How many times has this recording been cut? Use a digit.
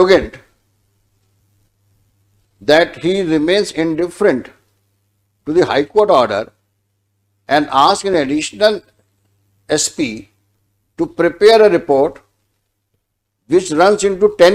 0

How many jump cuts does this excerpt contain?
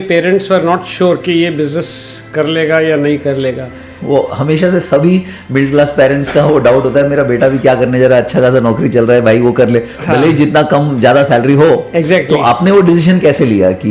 0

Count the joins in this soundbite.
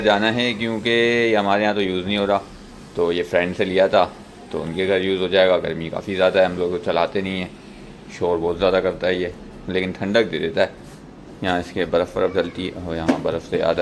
0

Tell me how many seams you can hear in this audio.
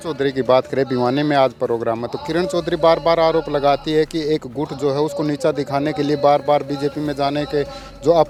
0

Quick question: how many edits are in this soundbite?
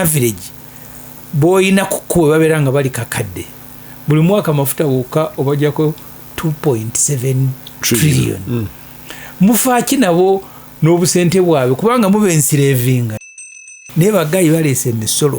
1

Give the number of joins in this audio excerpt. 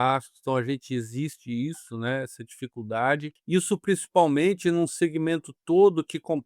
1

